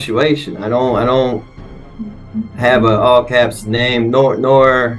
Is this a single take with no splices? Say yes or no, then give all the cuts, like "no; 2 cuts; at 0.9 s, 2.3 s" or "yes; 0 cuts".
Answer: yes; 0 cuts